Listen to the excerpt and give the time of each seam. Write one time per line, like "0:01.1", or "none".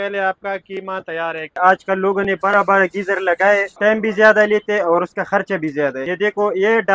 0:01.6
0:03.7
0:06.0